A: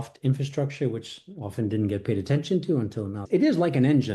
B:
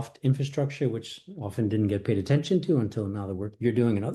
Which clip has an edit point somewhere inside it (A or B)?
A